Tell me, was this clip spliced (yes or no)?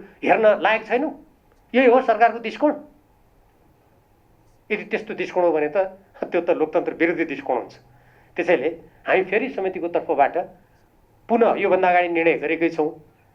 no